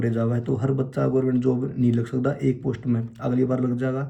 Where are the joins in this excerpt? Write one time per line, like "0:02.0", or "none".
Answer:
none